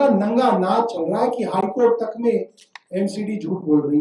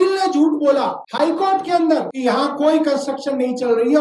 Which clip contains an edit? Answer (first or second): second